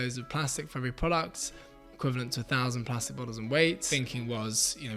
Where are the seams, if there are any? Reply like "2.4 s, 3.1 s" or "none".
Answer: 3.9 s